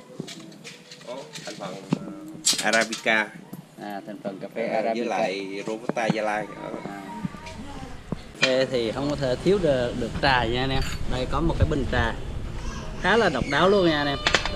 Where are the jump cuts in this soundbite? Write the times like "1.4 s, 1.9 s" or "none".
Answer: 8.4 s

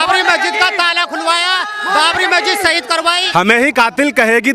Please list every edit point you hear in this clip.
3.2 s

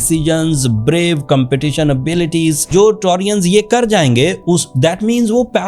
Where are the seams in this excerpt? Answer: 2.7 s

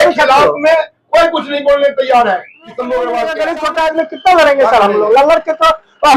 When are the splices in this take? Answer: 3.5 s

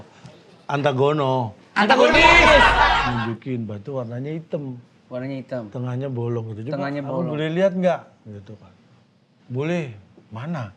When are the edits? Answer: 3.1 s

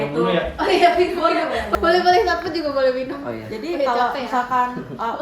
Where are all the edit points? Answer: 1.7 s

